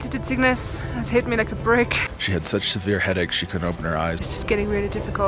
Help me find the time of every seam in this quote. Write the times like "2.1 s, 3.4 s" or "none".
2.0 s, 4.2 s

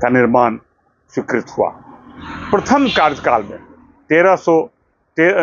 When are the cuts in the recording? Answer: none

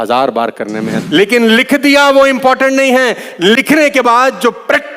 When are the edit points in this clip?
1.0 s

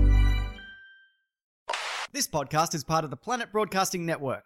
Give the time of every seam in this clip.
1.6 s

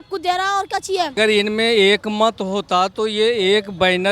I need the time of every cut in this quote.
1.1 s

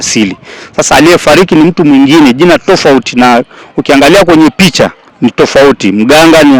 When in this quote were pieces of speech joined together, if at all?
5.0 s

